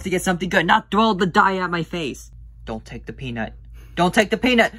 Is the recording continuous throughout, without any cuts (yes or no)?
no